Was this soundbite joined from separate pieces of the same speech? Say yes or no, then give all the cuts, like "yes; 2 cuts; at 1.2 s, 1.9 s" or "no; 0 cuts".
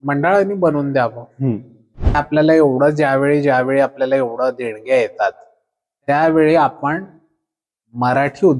yes; 1 cut; at 2.1 s